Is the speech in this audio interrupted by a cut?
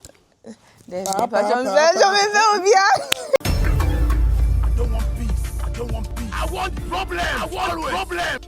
yes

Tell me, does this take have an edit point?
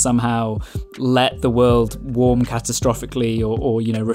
yes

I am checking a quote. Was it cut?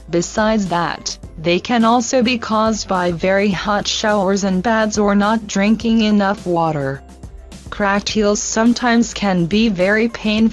yes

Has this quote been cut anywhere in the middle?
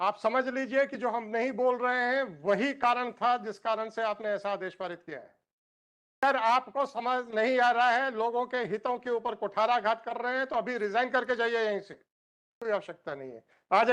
yes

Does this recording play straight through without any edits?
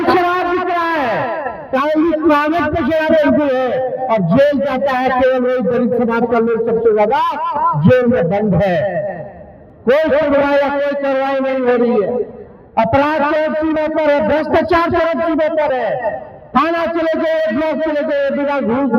yes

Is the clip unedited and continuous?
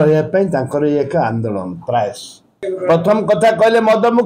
no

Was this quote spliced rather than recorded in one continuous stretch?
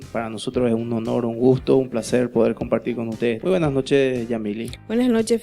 no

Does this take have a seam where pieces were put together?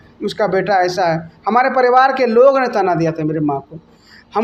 no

